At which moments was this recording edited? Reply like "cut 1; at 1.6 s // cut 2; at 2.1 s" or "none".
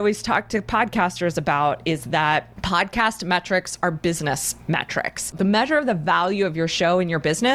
cut 1; at 2.5 s // cut 2; at 5.3 s